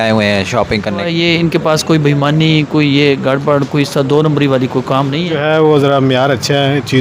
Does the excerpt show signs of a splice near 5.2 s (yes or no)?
yes